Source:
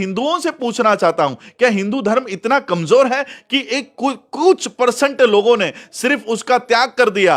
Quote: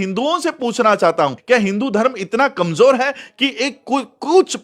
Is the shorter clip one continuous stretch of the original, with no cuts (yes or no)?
no